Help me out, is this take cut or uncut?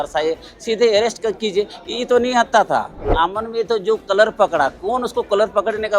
cut